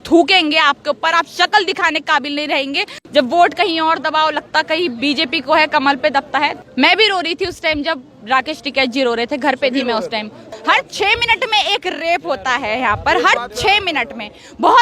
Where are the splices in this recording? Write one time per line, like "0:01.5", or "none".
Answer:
0:03.0
0:06.6
0:10.5